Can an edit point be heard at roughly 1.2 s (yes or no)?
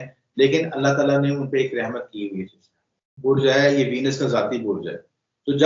no